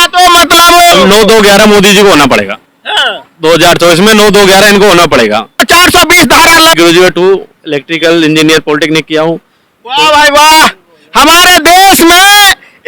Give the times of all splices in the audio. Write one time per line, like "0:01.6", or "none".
0:00.9
0:05.6
0:06.7